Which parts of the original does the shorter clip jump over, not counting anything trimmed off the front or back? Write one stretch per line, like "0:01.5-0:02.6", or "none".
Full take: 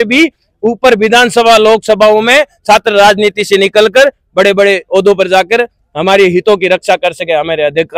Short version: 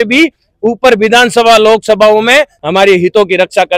0:02.5-0:05.9